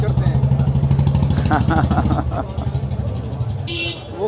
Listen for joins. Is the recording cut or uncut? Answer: uncut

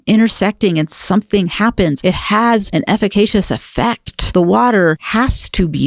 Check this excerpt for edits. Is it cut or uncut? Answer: cut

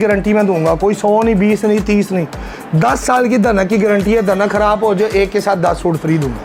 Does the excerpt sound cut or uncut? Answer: uncut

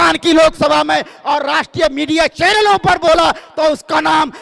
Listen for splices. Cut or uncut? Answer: uncut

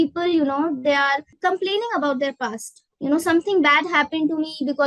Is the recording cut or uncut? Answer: cut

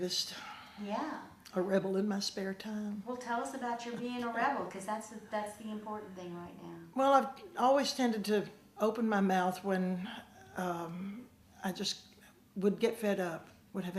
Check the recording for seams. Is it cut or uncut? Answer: cut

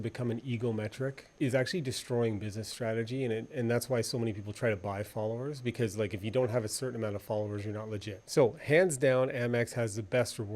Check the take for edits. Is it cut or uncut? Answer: cut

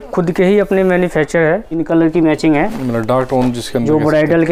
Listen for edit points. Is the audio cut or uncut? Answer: cut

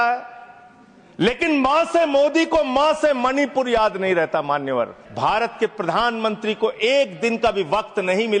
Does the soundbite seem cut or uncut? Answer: cut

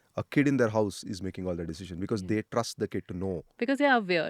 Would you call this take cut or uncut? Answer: uncut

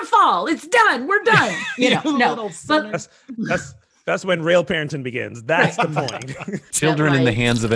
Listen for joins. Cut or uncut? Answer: cut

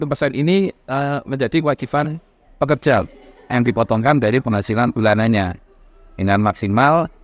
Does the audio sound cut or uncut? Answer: uncut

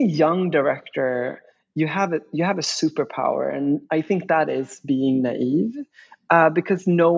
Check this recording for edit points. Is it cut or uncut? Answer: uncut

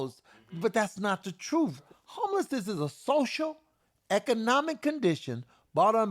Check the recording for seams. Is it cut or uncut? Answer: cut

